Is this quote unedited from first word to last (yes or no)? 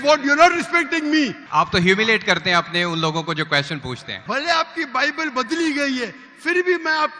no